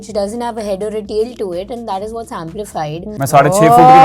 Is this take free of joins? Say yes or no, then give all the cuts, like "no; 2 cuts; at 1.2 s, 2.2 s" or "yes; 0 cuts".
no; 1 cut; at 3.1 s